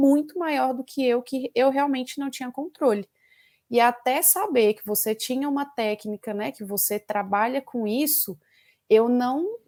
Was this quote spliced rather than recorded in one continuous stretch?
no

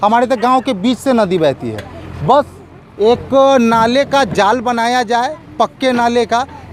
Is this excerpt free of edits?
yes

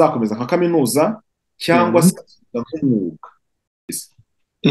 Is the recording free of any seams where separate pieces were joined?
no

